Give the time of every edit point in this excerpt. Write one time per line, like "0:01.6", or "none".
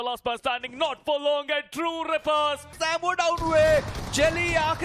0:02.7